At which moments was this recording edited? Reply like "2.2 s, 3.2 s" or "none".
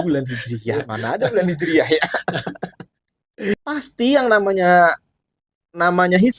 3.5 s